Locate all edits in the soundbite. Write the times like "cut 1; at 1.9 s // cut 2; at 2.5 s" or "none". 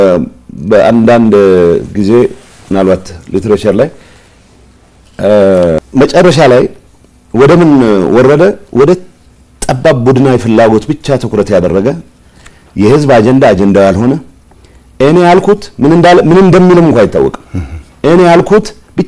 cut 1; at 5.8 s